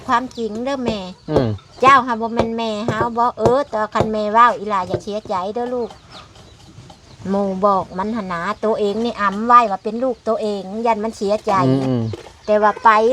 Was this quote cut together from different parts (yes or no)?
no